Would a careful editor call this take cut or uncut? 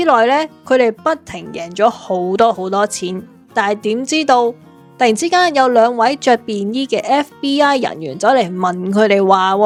uncut